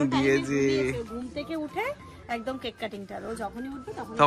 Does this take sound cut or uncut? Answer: uncut